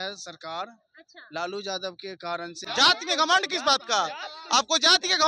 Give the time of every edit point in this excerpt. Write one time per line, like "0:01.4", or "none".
0:02.6

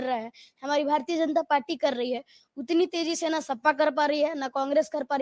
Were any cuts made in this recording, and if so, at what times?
none

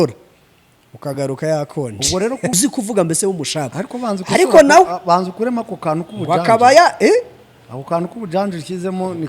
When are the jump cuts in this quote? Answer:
0:02.5

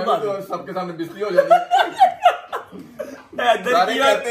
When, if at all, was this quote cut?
none

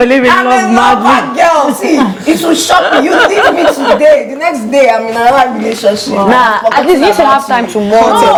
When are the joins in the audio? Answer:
none

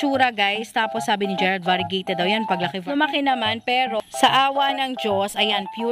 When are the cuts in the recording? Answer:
0:02.8

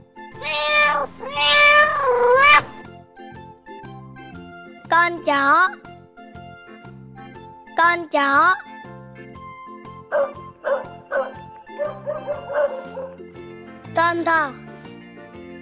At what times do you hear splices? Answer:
0:03.2
0:04.9
0:14.7

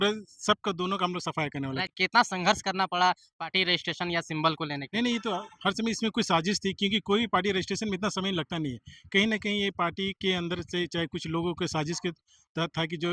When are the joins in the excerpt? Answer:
0:01.9

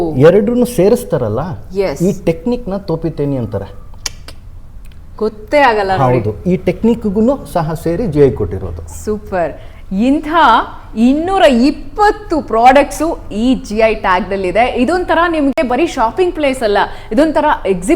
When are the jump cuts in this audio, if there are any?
none

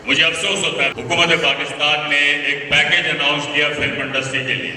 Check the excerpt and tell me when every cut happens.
0:00.9

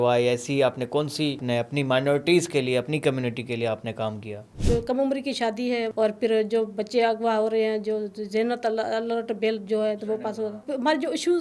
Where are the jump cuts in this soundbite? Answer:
0:01.4
0:04.6
0:05.9
0:10.6

